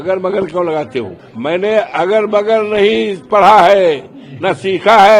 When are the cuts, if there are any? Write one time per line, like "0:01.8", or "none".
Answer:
0:01.2